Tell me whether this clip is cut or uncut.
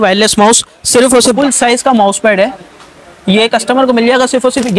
cut